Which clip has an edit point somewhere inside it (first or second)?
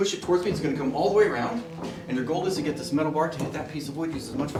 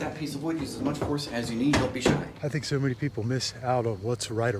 second